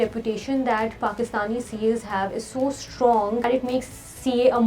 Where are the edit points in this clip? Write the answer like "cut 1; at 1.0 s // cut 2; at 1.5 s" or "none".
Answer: cut 1; at 3.5 s

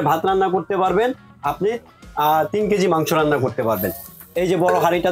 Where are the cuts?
none

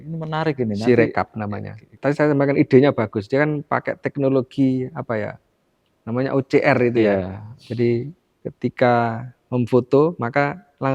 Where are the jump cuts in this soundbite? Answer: cut 1; at 1.8 s

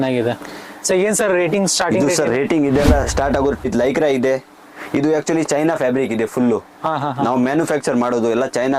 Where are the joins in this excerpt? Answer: cut 1; at 3.6 s

